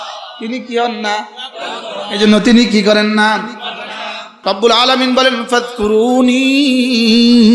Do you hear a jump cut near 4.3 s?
yes; 1 cut; at 4.3 s

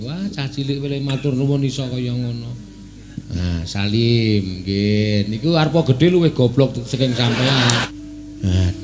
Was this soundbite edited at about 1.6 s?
no; 1 cut; at 7.9 s

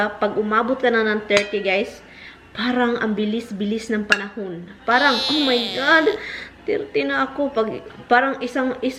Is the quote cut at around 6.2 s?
no; 0 cuts

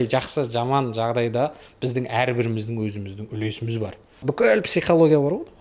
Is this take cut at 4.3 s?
yes; 1 cut; at 4.3 s

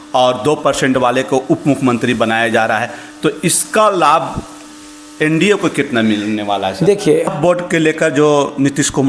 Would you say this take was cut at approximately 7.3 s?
yes; 1 cut; at 7.3 s

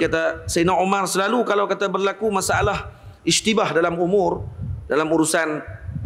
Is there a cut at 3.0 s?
no; 0 cuts

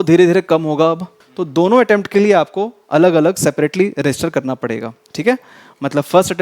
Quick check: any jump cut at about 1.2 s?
yes; 1 cut; at 1.2 s

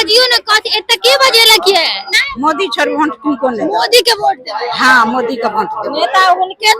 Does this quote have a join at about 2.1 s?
yes; 1 cut; at 2.1 s

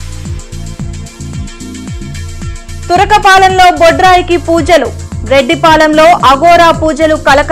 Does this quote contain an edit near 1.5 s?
no; 0 cuts

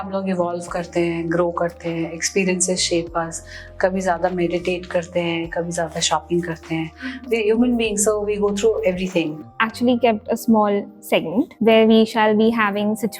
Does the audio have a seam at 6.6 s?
no; 2 cuts; at 9.4 s, 11.5 s

